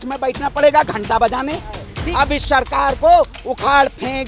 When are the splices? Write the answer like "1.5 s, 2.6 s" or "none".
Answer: 1.8 s